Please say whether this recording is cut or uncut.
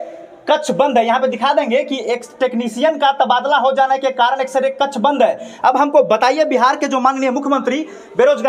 uncut